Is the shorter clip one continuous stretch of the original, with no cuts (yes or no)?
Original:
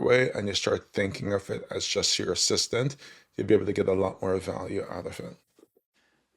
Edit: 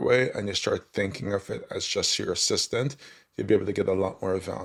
yes